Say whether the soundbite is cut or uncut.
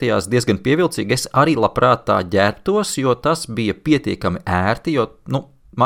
uncut